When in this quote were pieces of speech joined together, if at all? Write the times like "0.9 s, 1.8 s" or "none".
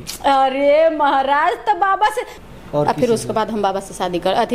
2.3 s